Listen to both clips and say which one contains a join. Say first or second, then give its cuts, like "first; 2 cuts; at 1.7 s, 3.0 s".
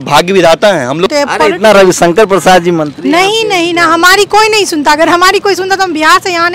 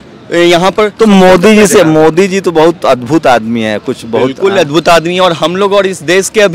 first; 1 cut; at 1.1 s